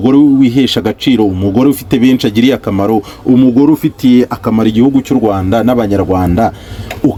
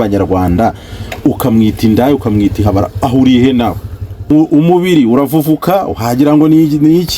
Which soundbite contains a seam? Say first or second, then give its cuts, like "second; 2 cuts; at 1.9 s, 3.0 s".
second; 1 cut; at 4.3 s